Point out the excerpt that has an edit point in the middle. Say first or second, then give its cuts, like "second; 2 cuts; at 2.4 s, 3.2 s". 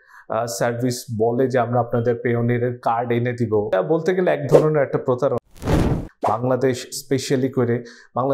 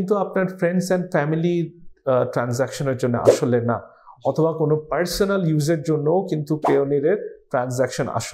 first; 1 cut; at 5.9 s